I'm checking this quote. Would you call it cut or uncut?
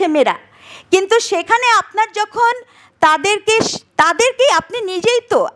uncut